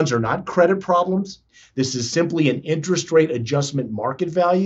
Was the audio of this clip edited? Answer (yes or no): yes